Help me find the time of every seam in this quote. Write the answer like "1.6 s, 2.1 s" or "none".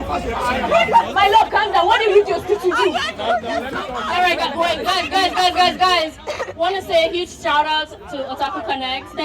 none